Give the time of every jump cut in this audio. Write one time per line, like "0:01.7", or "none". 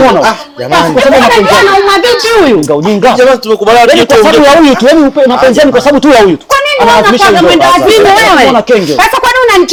none